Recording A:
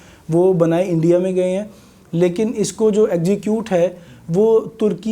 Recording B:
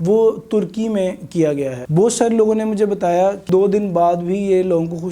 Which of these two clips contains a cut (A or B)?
B